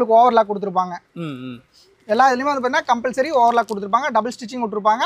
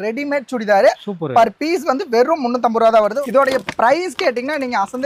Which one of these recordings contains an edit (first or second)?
second